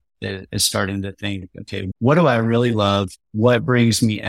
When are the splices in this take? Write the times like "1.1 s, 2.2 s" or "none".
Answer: 1.9 s